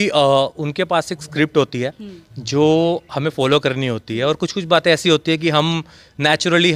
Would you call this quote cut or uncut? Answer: uncut